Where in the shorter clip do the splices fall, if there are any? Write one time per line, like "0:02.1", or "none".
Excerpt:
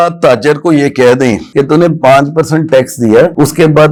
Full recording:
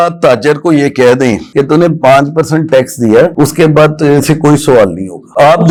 none